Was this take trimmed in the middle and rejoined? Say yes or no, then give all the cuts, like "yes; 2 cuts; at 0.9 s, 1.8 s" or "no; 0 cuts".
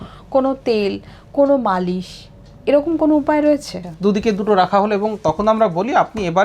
yes; 1 cut; at 3.7 s